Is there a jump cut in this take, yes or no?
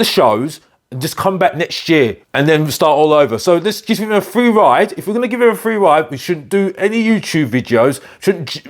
yes